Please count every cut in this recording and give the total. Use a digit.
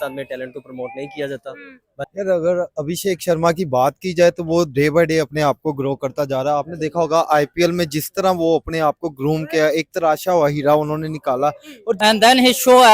2